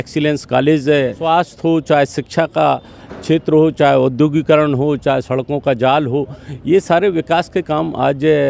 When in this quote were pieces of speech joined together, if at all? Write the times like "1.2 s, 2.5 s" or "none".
1.2 s